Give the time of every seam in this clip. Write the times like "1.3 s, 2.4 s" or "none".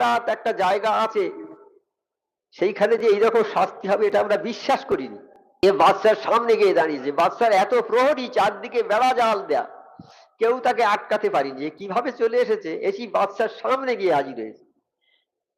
5.6 s